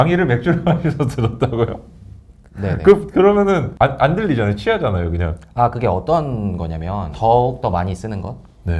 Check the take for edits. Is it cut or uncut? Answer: cut